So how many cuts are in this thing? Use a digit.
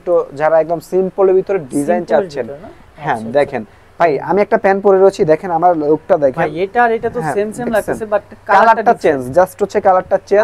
0